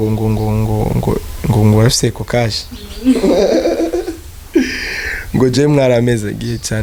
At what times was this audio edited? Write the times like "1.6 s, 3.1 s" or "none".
none